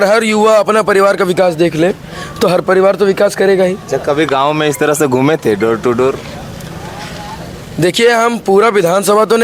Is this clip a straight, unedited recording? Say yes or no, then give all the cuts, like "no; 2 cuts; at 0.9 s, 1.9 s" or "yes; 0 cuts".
yes; 0 cuts